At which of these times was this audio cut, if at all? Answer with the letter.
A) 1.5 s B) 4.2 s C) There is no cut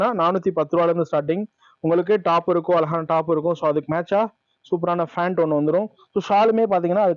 C